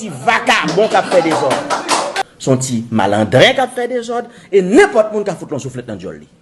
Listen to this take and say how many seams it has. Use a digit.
1